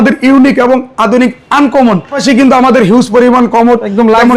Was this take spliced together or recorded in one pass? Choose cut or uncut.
cut